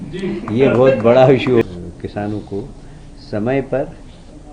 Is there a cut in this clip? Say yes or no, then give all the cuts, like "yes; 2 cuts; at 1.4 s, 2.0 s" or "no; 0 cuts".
yes; 1 cut; at 1.6 s